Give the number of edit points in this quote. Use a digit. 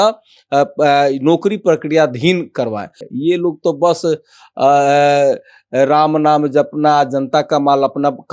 1